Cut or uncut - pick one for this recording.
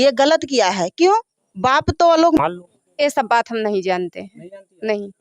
cut